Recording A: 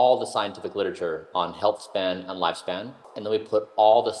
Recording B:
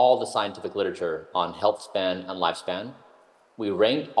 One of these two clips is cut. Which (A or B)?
A